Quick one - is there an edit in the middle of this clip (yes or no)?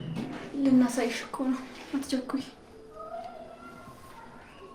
yes